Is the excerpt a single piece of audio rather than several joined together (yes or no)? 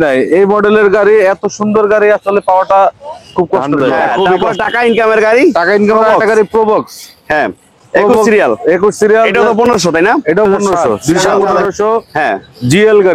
no